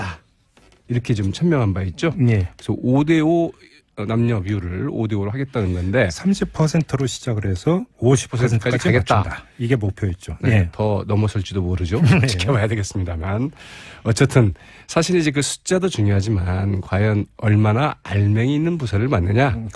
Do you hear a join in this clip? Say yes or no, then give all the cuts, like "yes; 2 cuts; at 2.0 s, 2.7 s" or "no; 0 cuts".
no; 0 cuts